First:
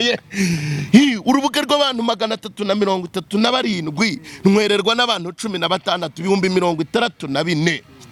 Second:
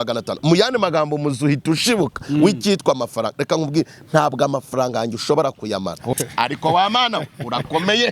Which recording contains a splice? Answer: second; 1 cut; at 6.1 s

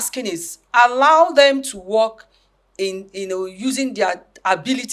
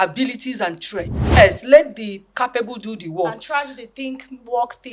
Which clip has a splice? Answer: second; 1 cut; at 1.4 s

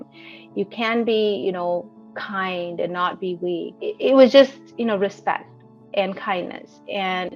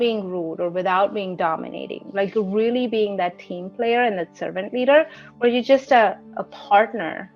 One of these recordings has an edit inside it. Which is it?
first; 1 cut; at 3.7 s

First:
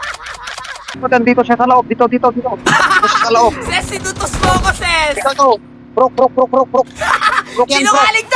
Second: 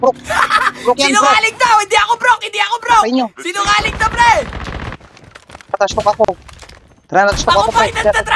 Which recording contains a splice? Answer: first; 1 cut; at 0.9 s

